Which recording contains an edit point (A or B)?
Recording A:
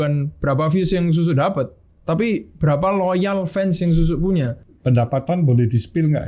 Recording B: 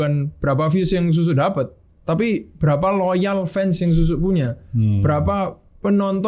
A